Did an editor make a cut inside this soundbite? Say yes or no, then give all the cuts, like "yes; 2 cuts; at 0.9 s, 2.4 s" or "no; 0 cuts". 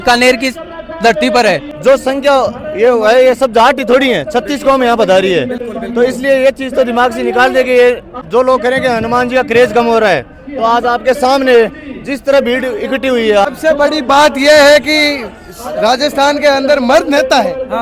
yes; 3 cuts; at 1.7 s, 8.1 s, 13.5 s